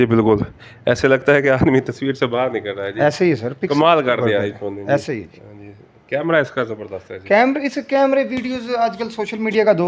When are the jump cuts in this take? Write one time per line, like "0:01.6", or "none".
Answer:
none